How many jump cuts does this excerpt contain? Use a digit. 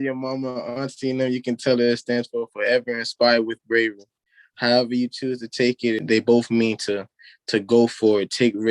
1